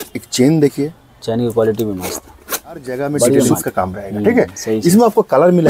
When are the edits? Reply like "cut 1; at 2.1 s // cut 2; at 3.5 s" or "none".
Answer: cut 1; at 3.6 s